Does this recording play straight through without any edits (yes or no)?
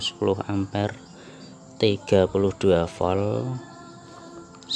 yes